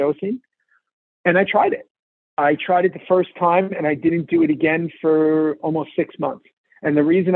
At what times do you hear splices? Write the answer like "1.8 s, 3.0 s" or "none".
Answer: none